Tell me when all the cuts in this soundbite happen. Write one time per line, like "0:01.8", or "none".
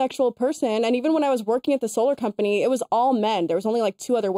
none